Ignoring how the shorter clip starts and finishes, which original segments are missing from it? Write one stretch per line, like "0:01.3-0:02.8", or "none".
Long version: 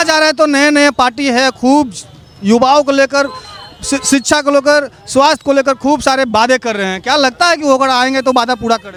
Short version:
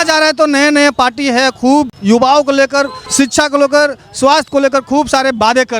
0:01.9-0:02.3
0:03.5-0:04.0